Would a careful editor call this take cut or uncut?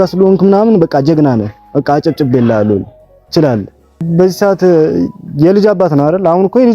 cut